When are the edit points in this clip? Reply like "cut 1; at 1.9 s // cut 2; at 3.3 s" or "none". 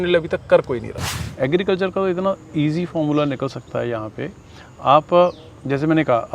cut 1; at 1.1 s